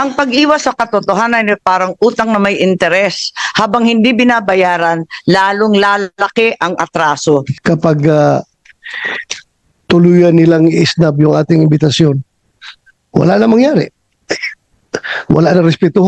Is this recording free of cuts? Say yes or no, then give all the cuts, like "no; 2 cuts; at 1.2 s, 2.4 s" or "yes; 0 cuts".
no; 1 cut; at 7.5 s